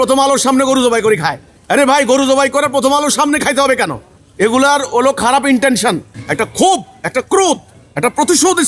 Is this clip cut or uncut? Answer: cut